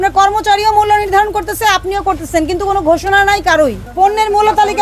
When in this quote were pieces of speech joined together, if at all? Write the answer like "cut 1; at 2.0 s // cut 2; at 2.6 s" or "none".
cut 1; at 3.8 s